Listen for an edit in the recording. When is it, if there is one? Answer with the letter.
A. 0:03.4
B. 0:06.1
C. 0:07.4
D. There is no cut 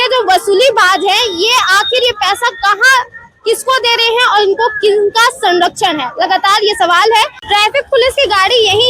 C